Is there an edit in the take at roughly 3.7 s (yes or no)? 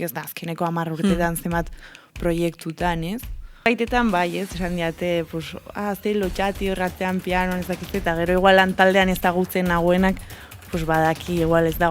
yes